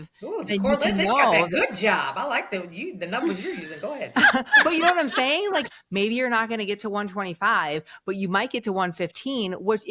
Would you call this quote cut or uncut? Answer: cut